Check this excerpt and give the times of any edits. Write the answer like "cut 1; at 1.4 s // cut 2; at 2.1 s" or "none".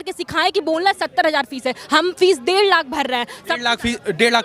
none